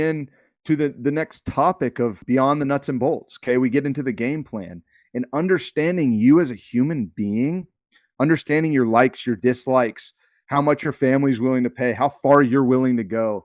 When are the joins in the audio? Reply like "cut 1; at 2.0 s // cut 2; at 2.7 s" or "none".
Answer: cut 1; at 2.2 s